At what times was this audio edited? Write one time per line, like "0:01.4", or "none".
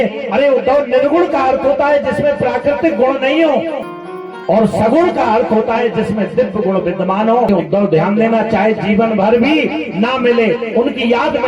0:03.9
0:07.5